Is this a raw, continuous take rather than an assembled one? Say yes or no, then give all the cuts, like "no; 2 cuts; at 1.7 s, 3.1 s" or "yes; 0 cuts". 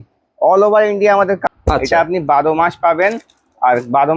no; 1 cut; at 1.4 s